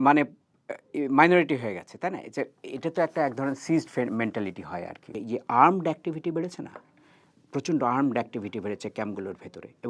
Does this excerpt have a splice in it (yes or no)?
yes